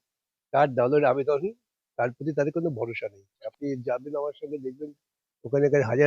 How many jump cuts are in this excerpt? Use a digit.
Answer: 1